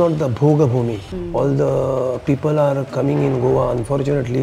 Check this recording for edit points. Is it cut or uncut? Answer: cut